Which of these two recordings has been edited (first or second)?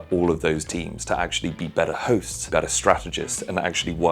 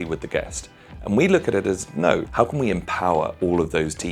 first